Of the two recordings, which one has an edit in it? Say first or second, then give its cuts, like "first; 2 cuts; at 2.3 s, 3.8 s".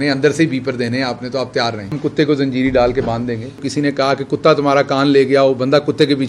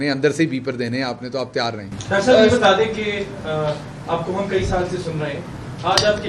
first; 2 cuts; at 1.9 s, 3.6 s